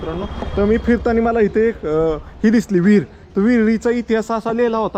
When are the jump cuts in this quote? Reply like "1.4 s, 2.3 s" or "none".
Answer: none